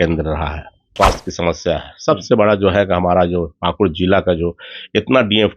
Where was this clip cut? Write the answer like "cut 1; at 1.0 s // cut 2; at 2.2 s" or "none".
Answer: cut 1; at 0.9 s